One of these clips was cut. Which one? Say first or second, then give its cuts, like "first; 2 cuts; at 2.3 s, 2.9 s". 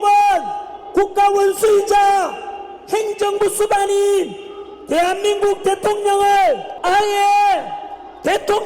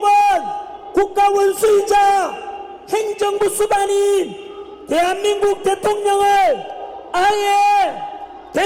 first; 1 cut; at 6.7 s